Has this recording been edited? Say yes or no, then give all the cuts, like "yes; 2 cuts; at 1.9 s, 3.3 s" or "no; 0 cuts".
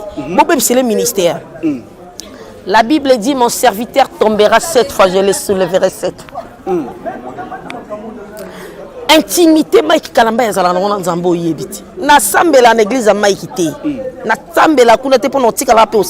no; 0 cuts